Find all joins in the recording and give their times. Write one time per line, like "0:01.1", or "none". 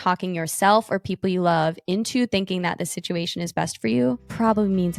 none